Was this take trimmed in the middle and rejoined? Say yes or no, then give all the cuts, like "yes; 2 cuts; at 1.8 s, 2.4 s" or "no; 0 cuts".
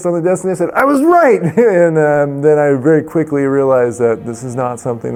no; 0 cuts